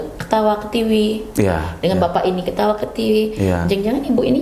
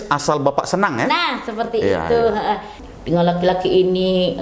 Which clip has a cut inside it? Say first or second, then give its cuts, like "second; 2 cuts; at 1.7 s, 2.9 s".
second; 1 cut; at 2.8 s